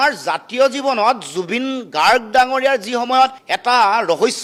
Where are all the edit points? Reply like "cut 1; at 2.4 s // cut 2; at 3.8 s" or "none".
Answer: none